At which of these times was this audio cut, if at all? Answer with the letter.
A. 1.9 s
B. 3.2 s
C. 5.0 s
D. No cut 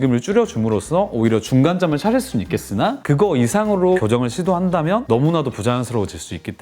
D